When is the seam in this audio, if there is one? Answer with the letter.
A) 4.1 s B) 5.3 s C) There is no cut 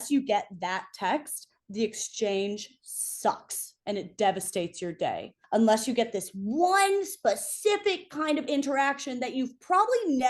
B